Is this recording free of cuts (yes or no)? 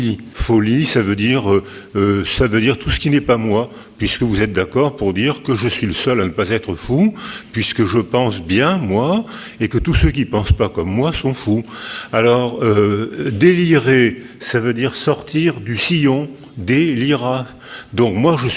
no